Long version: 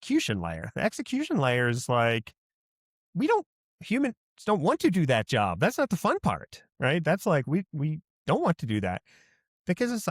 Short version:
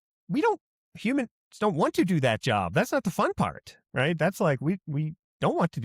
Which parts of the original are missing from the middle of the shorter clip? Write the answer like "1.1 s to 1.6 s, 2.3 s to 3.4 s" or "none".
none